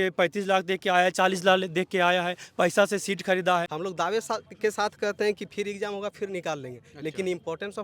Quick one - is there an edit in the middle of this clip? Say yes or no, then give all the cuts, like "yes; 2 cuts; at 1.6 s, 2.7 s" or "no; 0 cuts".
yes; 1 cut; at 3.7 s